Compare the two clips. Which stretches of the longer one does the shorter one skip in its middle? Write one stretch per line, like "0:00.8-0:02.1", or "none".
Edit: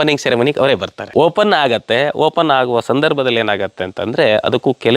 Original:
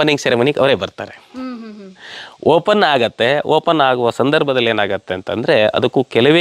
0:01.0-0:02.3